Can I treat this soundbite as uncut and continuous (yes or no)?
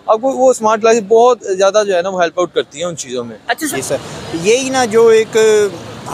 no